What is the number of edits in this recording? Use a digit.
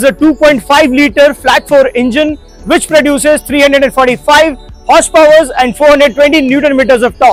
0